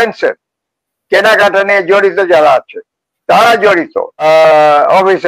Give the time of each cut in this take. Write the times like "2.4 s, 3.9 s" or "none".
4.2 s